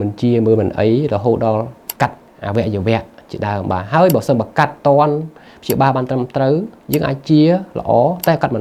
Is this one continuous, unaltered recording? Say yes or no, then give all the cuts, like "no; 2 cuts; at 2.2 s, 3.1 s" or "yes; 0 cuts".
yes; 0 cuts